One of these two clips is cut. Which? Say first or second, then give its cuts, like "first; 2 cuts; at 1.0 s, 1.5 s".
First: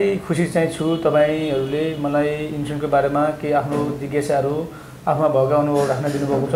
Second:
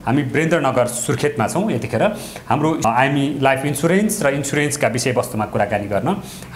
second; 1 cut; at 2.8 s